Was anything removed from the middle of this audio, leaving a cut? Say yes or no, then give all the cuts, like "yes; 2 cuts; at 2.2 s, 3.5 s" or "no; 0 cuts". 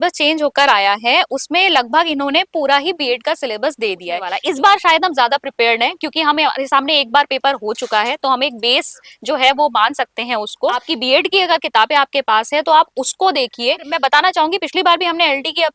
yes; 3 cuts; at 4.3 s, 10.9 s, 13.9 s